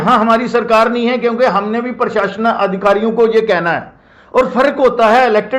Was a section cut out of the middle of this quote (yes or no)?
no